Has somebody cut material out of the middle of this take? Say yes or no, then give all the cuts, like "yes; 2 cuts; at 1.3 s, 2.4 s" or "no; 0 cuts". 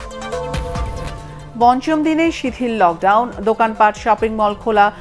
no; 0 cuts